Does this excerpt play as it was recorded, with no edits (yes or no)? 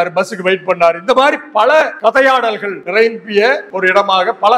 no